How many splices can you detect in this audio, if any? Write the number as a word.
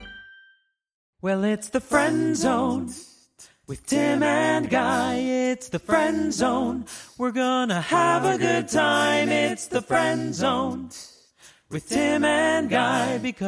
one